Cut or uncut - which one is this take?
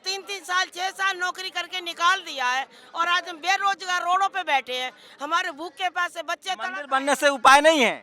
uncut